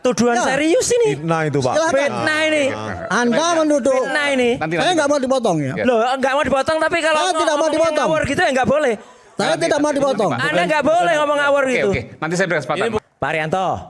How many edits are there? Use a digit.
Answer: 1